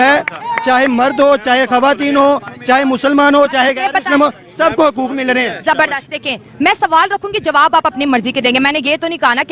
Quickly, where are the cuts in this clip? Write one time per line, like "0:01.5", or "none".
none